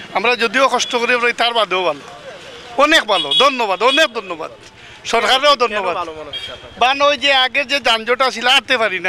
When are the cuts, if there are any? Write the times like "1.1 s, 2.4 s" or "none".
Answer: none